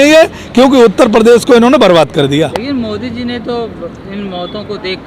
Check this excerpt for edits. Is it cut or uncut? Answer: uncut